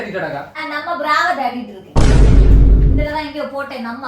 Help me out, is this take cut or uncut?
cut